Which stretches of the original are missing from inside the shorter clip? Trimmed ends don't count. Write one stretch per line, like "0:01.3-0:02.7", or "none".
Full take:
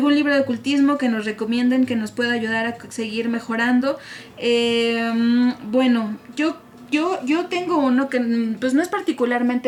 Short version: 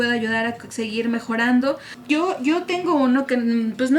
0:04.1-0:06.7